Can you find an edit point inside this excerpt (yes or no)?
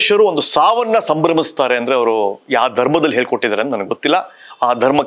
no